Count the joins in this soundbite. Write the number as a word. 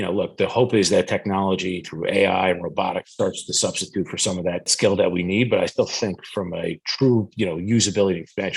one